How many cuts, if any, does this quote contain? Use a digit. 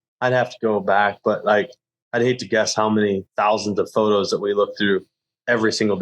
0